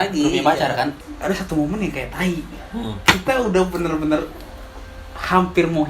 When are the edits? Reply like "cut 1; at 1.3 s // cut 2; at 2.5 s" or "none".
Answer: cut 1; at 1.0 s